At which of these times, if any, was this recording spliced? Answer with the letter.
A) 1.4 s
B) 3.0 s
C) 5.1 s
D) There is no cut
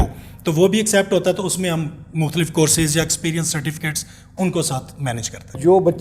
D